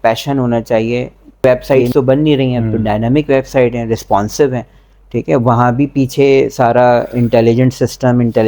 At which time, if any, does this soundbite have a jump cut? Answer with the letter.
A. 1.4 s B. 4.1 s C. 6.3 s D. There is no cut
A